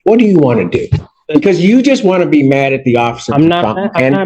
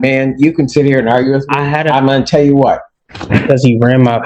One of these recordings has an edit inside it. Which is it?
second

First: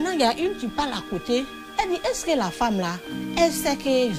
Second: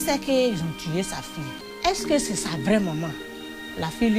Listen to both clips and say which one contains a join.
second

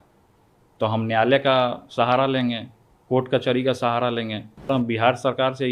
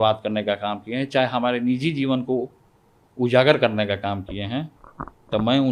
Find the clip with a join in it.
first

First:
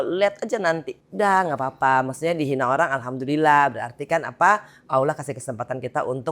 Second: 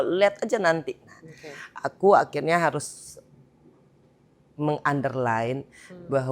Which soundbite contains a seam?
first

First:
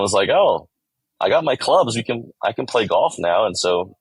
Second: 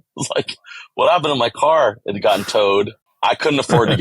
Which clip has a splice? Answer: second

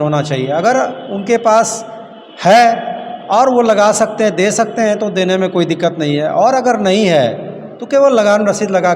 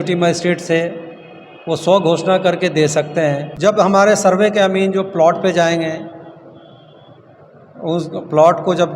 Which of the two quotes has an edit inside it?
second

